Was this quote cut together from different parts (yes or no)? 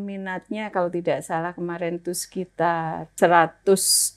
yes